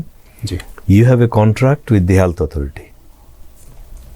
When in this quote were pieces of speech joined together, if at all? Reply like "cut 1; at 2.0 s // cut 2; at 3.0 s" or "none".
none